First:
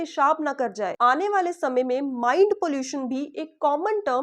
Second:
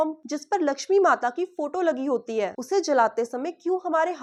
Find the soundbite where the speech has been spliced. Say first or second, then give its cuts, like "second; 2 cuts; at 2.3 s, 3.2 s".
first; 1 cut; at 0.9 s